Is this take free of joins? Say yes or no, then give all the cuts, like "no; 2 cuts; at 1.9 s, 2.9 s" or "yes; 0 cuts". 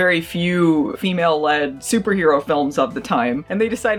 yes; 0 cuts